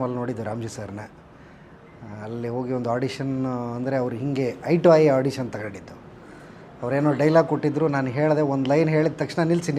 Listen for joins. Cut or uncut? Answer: uncut